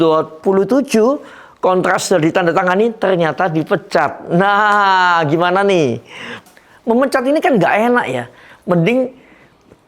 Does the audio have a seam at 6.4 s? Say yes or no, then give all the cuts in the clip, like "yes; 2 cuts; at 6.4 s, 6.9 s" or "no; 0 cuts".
yes; 1 cut; at 6.4 s